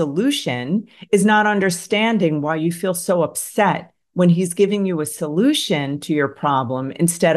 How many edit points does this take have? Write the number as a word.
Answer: zero